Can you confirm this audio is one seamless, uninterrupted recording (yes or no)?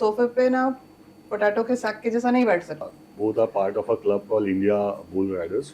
no